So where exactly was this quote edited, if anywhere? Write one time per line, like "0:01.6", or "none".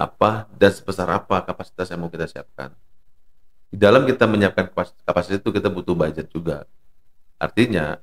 none